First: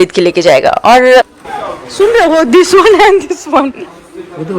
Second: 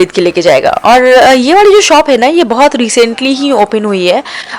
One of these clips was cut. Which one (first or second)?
first